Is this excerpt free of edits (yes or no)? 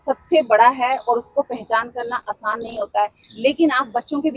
yes